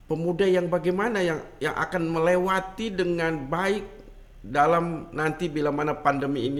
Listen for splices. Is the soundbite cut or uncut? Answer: uncut